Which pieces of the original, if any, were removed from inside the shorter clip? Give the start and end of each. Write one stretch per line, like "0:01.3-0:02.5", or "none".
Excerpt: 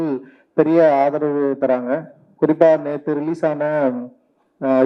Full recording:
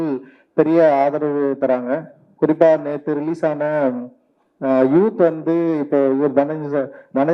none